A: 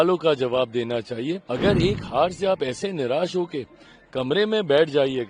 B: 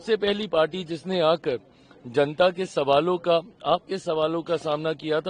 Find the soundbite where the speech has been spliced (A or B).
A